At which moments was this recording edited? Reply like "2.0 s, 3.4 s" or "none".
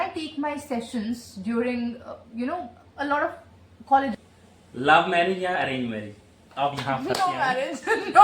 4.2 s